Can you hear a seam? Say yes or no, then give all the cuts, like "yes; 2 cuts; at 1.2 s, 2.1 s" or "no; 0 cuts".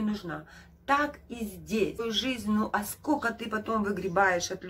yes; 1 cut; at 2.0 s